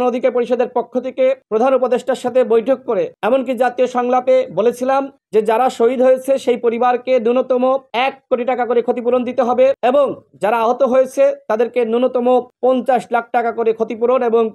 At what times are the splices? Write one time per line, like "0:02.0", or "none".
none